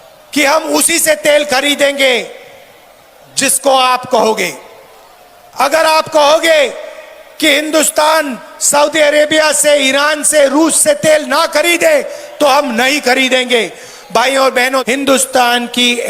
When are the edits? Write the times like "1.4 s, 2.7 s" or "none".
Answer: 14.8 s